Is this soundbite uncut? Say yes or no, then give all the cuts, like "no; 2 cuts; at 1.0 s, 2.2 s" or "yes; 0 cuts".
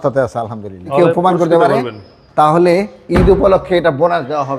no; 1 cut; at 0.9 s